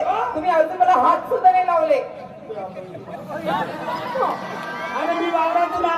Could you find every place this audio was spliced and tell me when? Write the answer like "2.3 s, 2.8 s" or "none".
3.9 s